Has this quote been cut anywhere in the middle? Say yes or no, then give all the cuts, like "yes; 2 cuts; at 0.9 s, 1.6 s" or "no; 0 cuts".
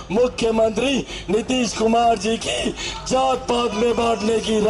no; 0 cuts